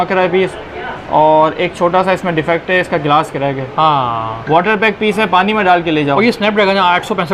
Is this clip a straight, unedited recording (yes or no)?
yes